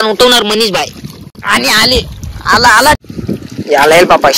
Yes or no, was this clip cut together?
yes